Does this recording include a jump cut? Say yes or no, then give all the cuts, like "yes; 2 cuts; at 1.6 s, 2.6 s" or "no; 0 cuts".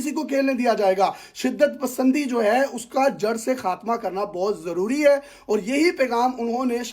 no; 0 cuts